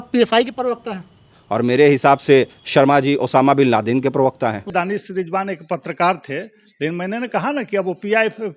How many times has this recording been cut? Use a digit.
1